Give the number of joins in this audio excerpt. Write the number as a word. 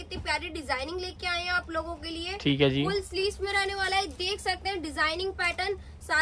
zero